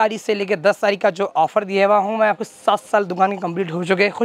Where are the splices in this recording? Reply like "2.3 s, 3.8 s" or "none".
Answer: none